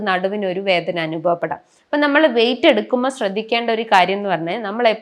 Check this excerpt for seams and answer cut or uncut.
uncut